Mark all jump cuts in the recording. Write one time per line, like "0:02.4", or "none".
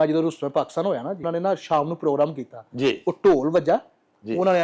0:01.1